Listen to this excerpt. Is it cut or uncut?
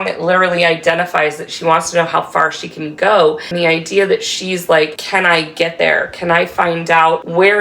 cut